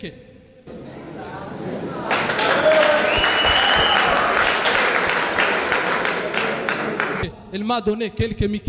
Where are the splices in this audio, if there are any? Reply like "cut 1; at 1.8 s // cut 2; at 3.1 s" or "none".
cut 1; at 7.3 s